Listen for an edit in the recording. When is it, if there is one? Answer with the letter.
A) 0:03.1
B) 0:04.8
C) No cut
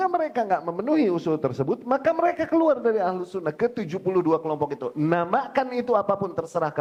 C